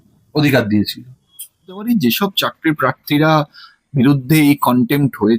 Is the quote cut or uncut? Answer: cut